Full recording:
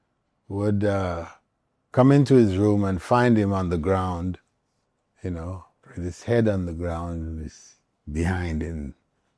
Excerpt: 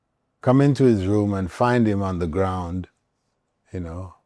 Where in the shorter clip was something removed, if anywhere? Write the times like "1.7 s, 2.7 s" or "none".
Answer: none